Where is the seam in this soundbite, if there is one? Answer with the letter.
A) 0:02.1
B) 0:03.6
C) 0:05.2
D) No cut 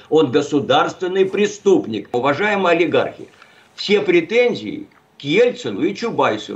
A